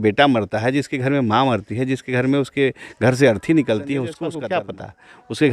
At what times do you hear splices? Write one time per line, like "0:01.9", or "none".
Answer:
0:04.2